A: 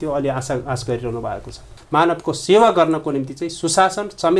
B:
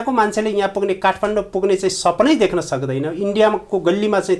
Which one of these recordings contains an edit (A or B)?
A